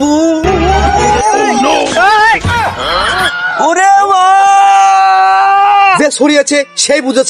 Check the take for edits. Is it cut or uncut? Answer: cut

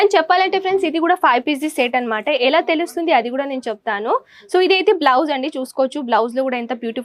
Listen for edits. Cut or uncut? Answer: uncut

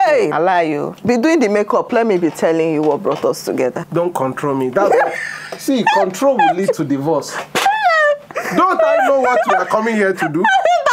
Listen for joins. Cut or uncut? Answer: cut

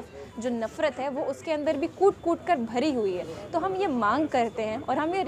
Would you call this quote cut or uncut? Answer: uncut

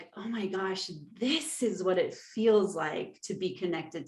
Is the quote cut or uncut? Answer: uncut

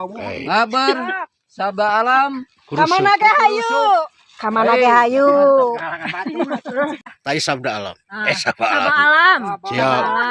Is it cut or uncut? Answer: cut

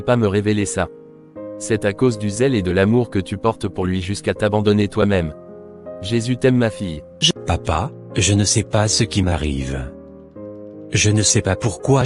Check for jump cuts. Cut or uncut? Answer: cut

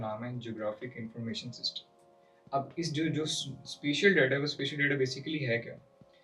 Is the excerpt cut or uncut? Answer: uncut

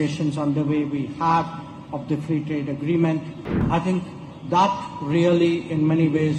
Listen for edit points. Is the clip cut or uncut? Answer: cut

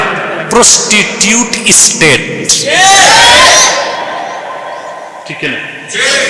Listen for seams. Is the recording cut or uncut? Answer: uncut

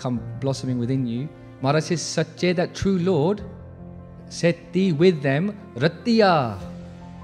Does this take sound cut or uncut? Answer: cut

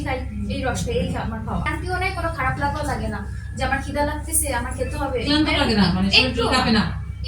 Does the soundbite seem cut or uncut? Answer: cut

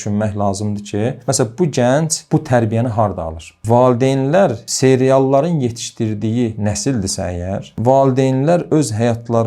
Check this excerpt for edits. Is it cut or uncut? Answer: cut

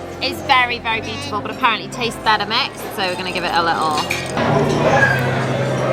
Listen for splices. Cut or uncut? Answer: cut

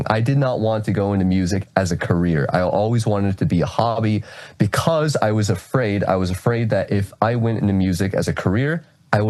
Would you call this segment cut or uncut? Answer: uncut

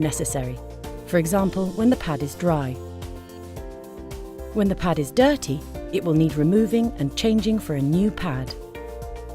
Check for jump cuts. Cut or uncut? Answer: cut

